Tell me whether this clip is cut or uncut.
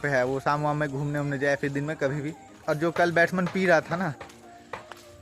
cut